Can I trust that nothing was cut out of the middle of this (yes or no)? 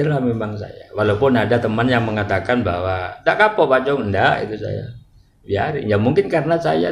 yes